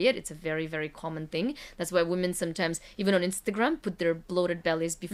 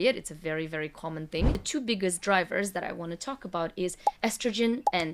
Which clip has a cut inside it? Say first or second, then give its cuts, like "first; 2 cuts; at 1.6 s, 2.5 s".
second; 1 cut; at 1.6 s